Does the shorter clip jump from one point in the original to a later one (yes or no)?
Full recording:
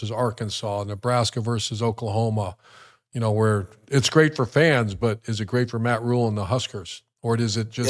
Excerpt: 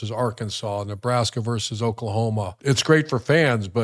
yes